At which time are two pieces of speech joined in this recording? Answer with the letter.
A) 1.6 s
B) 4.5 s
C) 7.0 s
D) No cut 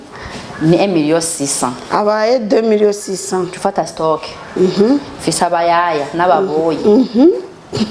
D